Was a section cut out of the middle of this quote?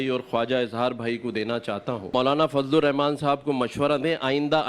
yes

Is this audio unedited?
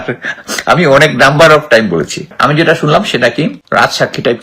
no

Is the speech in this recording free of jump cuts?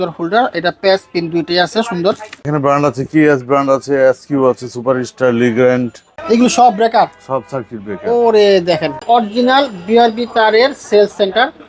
no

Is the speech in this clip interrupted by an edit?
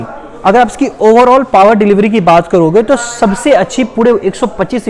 no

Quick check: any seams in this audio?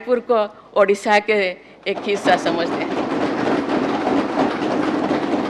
no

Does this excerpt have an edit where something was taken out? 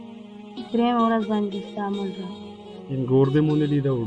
yes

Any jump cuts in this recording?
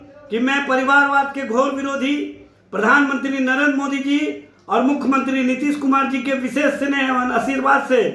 no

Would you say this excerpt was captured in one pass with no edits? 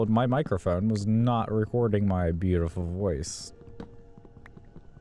yes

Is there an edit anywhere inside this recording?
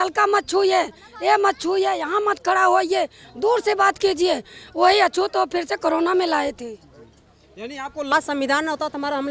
yes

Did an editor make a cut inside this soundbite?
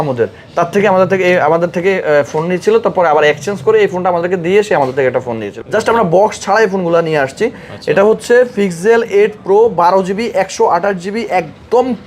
yes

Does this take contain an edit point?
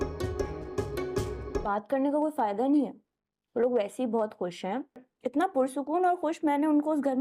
no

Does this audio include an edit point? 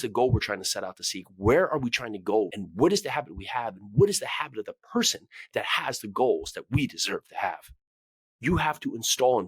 yes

